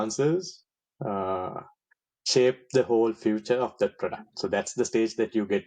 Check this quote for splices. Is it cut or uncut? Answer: uncut